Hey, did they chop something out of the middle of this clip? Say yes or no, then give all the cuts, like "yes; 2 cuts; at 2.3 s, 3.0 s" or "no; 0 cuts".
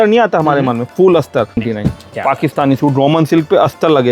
yes; 1 cut; at 1.6 s